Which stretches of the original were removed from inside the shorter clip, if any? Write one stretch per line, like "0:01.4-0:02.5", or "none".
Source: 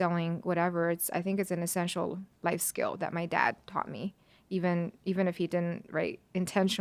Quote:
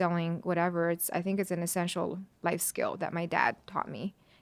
none